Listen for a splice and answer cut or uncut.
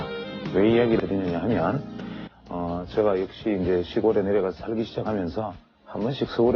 cut